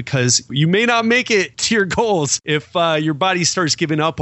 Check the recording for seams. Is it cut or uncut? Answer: cut